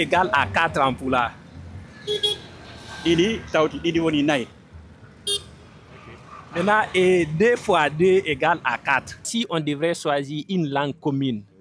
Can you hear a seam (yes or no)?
yes